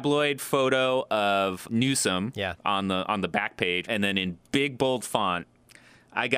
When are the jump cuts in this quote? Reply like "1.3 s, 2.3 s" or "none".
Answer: 1.6 s, 3.8 s